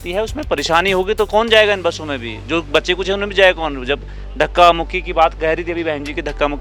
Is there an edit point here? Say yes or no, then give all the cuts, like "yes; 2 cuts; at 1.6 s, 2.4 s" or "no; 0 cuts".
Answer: no; 0 cuts